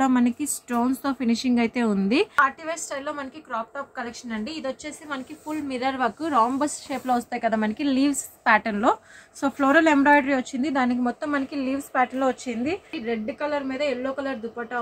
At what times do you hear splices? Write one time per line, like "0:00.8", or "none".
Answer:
0:02.3
0:13.0